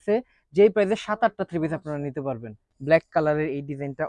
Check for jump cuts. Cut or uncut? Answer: cut